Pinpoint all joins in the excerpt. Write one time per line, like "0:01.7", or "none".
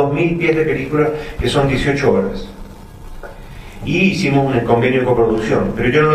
0:04.1